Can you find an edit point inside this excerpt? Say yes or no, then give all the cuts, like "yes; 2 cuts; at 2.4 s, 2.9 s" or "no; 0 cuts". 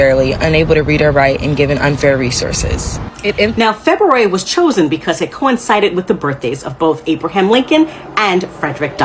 yes; 1 cut; at 3.5 s